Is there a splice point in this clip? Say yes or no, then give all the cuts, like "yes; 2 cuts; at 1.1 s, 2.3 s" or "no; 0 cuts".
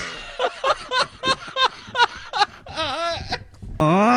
no; 0 cuts